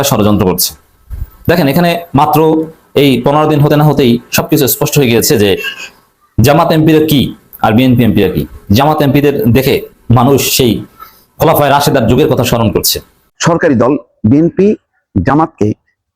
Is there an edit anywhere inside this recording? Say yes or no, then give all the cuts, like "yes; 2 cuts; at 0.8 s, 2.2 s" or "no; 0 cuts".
yes; 1 cut; at 13.3 s